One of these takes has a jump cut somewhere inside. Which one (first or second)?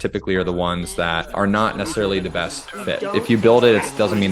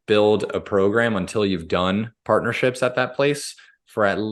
first